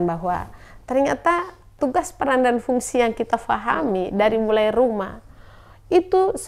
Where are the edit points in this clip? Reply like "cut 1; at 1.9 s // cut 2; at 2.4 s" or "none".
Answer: cut 1; at 1.7 s